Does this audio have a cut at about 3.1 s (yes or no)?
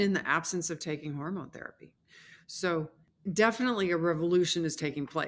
yes